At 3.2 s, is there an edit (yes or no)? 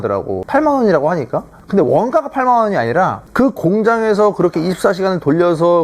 yes